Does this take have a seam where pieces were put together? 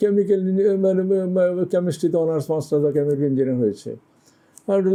no; 0 cuts

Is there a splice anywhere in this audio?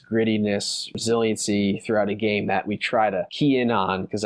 yes; 2 cuts; at 0.9 s, 3.3 s

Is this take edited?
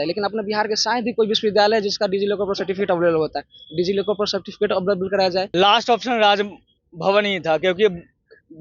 yes; 1 cut; at 5.5 s

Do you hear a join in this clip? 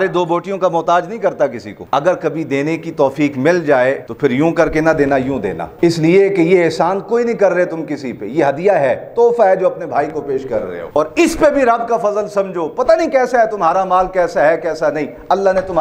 no; 0 cuts

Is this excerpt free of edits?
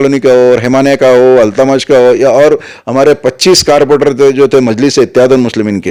yes; 0 cuts

